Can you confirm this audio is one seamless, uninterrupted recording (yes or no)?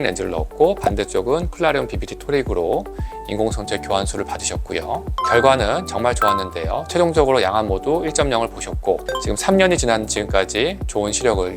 no